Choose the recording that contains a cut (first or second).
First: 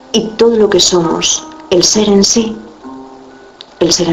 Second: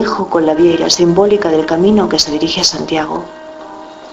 second